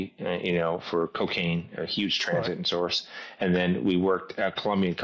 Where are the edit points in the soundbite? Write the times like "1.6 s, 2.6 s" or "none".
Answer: none